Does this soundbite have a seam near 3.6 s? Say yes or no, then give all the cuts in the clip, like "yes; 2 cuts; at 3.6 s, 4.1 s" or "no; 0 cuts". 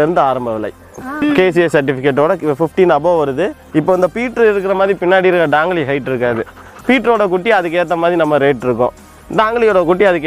yes; 2 cuts; at 1.0 s, 3.6 s